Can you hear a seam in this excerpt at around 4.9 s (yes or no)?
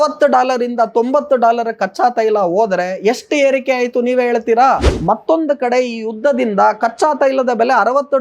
yes